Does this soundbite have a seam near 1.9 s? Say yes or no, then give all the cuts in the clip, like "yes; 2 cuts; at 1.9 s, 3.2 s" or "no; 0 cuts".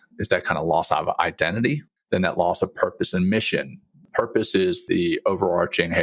yes; 1 cut; at 1.9 s